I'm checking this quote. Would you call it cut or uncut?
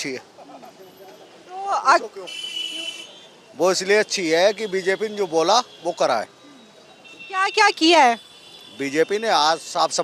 uncut